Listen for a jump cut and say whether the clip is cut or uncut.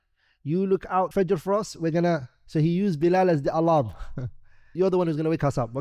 cut